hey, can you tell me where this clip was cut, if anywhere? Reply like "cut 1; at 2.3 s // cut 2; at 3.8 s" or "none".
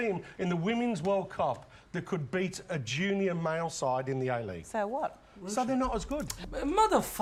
none

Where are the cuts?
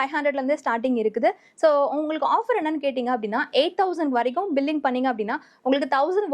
none

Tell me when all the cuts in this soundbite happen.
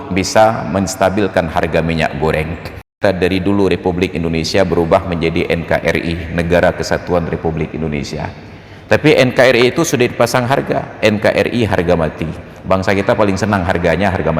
cut 1; at 3.0 s

